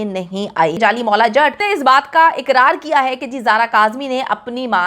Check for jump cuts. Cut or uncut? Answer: cut